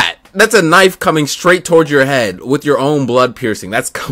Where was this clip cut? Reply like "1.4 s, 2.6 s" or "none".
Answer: none